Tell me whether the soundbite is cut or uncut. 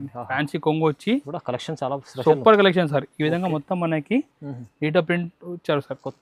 uncut